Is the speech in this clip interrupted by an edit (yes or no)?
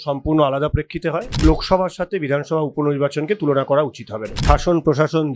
yes